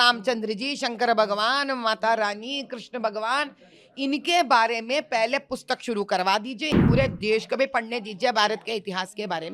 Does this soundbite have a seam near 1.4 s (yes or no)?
no